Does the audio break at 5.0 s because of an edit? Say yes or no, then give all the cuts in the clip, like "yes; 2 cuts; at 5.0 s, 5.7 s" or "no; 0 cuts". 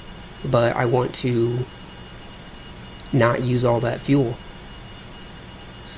yes; 1 cut; at 5.0 s